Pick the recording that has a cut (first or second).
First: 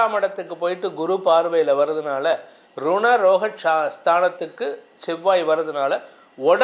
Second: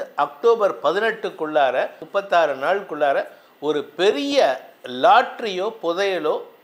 second